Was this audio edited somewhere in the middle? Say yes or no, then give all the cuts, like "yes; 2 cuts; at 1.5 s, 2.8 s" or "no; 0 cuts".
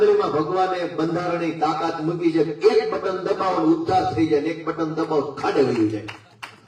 no; 0 cuts